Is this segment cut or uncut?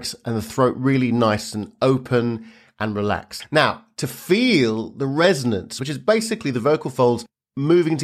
cut